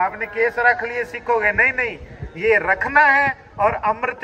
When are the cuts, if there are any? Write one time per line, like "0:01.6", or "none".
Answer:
none